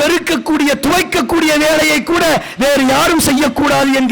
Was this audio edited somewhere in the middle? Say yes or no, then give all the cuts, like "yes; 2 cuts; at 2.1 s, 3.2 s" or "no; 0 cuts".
no; 0 cuts